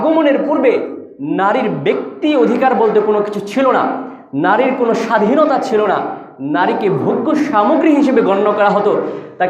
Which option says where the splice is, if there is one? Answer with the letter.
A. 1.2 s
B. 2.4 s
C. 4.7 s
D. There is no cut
D